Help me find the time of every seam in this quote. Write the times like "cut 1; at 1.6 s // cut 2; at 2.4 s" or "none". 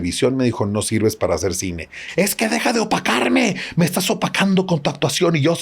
cut 1; at 2.0 s

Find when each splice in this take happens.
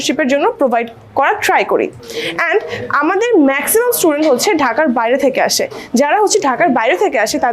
none

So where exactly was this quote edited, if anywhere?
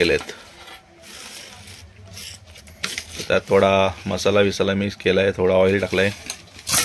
none

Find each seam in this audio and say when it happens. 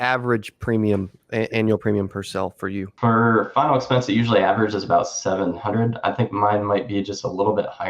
cut 1; at 2.9 s

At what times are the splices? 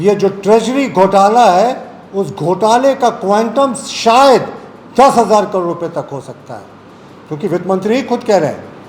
none

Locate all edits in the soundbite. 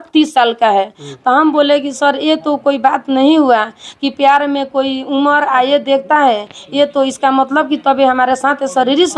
none

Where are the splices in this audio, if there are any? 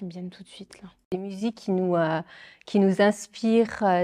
cut 1; at 1.1 s

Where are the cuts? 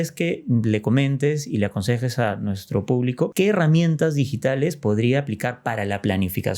cut 1; at 3.3 s

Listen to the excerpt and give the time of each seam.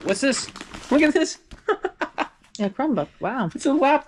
none

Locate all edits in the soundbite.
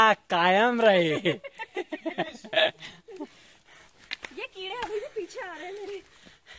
none

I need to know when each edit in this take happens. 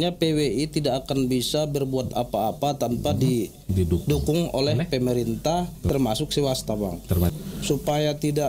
cut 1; at 5.9 s // cut 2; at 7.3 s

